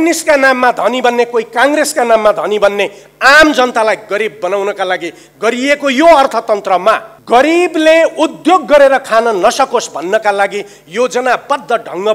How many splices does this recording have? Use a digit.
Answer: 1